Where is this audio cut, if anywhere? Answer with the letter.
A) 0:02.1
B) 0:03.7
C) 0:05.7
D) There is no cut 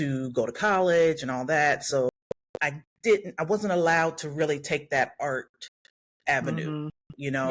A